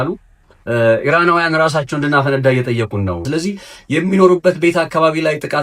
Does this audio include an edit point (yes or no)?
yes